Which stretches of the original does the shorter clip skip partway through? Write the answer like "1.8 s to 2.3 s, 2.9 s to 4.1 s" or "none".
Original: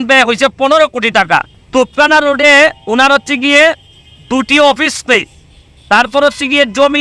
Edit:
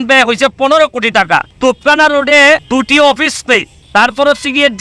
1.5 s to 1.6 s, 2.8 s to 4.2 s, 5.4 s to 5.7 s